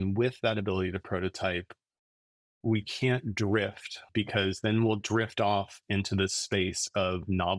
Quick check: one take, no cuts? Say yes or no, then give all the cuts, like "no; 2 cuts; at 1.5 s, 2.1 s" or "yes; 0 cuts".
no; 1 cut; at 4.0 s